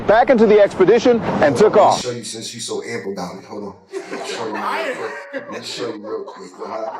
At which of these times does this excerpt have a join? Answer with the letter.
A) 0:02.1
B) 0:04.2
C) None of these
A